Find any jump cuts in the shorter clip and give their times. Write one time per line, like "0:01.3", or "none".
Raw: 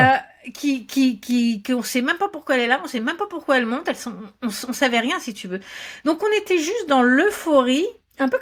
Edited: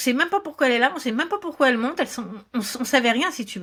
none